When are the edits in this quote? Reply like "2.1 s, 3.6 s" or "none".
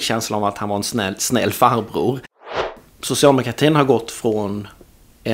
2.7 s